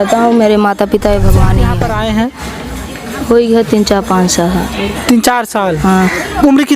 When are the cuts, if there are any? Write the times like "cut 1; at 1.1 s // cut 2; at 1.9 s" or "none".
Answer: cut 1; at 1.6 s